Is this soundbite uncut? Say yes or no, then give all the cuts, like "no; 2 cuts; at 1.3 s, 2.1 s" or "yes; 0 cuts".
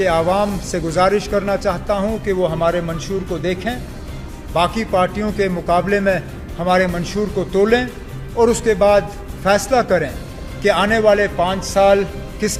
yes; 0 cuts